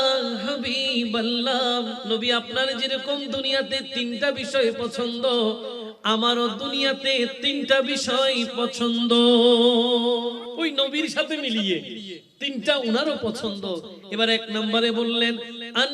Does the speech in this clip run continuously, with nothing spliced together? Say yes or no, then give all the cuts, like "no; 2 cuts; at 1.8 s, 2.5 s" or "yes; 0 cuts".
no; 2 cuts; at 2.0 s, 10.5 s